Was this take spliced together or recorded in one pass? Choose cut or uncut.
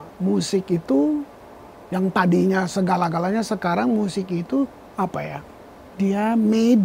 cut